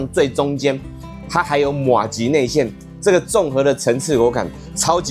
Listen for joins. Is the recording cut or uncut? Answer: uncut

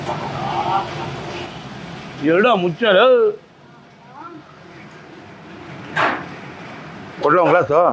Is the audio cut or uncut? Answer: uncut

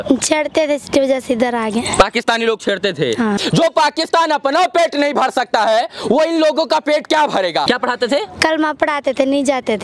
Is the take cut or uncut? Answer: cut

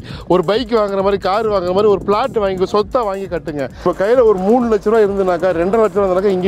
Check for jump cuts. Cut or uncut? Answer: cut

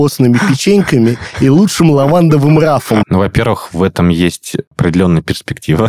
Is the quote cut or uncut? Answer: cut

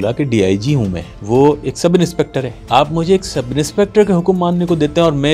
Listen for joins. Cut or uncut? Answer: cut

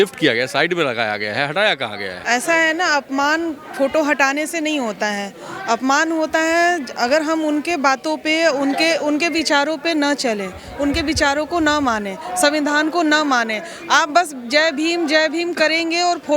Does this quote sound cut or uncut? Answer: cut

